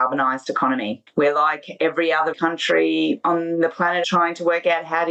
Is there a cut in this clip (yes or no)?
yes